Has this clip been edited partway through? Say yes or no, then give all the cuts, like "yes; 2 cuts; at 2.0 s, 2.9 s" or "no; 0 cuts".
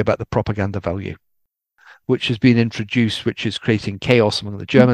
yes; 1 cut; at 1.6 s